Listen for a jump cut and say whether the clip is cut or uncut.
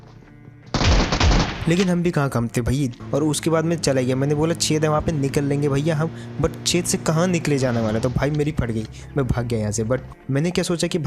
cut